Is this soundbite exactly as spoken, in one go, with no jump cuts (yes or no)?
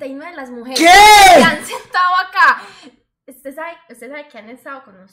yes